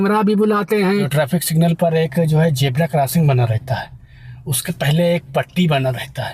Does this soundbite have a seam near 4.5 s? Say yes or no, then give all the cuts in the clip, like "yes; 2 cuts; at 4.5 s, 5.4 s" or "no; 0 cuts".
no; 1 cut; at 1.1 s